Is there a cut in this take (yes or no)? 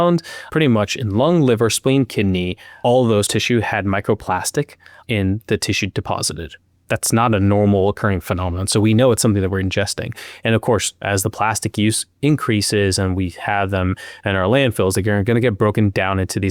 no